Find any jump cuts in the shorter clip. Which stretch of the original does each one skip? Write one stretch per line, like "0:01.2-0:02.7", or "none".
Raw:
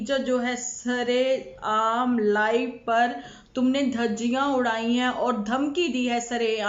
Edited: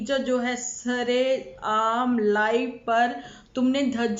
none